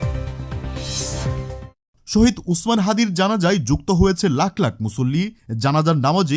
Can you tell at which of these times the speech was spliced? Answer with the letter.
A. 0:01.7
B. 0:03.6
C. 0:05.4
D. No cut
A